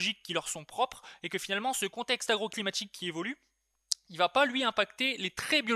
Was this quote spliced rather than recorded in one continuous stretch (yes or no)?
no